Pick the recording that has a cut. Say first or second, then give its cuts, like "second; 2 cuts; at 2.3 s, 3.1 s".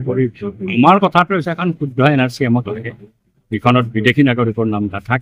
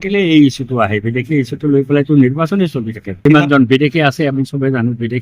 second; 1 cut; at 3.1 s